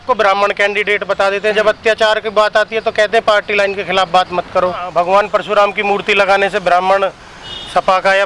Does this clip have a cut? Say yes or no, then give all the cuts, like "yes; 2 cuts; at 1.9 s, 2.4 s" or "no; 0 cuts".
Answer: yes; 1 cut; at 4.9 s